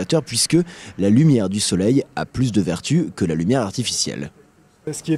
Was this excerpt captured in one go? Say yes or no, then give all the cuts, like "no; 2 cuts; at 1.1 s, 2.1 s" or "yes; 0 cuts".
no; 1 cut; at 3.7 s